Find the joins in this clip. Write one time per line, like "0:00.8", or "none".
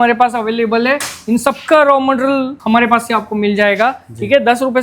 0:02.6